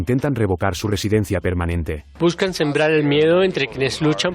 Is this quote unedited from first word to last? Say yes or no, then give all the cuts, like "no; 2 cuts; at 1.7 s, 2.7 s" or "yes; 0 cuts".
no; 1 cut; at 2.0 s